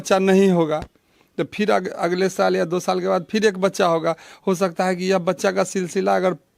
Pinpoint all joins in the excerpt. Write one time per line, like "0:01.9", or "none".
none